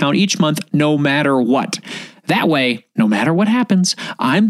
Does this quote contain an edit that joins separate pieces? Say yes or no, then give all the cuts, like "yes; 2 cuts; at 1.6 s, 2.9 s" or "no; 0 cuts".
yes; 1 cut; at 2.8 s